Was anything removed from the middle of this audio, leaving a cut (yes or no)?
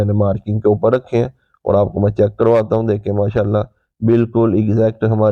no